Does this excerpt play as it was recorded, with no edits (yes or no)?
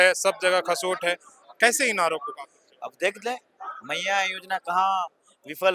yes